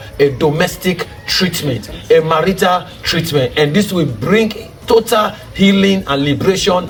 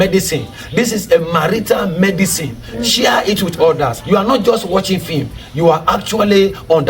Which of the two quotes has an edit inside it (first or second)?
second